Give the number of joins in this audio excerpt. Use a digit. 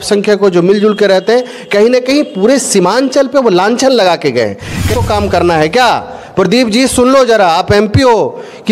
1